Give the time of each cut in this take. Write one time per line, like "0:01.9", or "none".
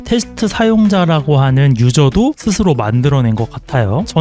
none